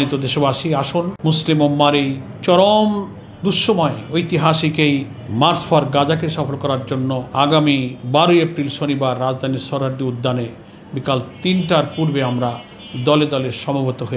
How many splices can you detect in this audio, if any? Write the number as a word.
five